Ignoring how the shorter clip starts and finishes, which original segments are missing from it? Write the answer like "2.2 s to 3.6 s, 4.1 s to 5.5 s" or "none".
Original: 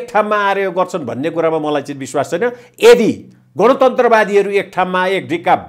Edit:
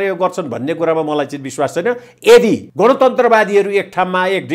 3.2 s to 3.5 s